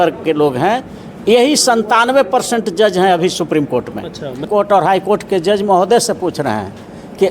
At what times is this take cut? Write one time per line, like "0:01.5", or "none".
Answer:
0:04.5